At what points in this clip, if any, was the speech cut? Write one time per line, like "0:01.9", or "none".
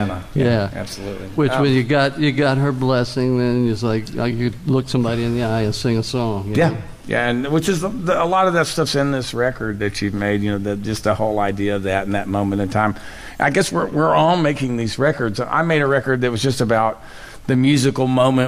0:10.4